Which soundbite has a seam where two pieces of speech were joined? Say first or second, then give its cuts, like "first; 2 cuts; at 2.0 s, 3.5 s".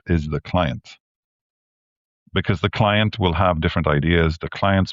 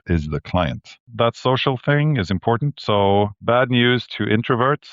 second; 2 cuts; at 1.1 s, 3.4 s